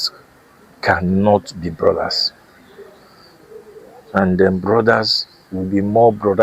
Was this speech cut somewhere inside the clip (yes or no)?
no